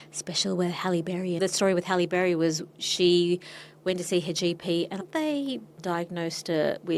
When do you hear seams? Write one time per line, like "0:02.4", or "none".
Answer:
0:01.4
0:05.0